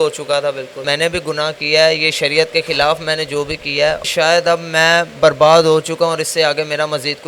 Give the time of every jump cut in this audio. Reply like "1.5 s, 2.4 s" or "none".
0.8 s, 4.0 s